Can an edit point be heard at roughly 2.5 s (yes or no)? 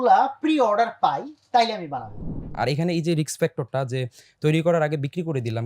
yes